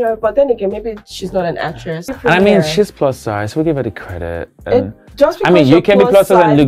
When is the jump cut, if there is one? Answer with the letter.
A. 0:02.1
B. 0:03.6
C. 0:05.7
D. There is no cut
A